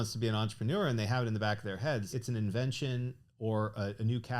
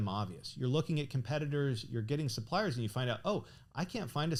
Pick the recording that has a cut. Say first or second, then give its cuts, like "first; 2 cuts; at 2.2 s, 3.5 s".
first; 1 cut; at 2.1 s